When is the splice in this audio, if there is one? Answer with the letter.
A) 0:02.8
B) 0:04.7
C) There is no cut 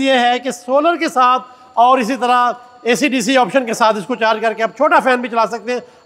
C